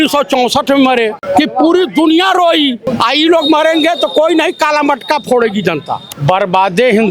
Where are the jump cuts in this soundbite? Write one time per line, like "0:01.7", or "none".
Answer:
0:01.2
0:02.8
0:06.1